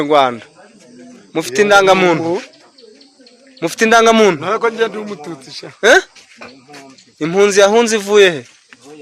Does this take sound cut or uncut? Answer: uncut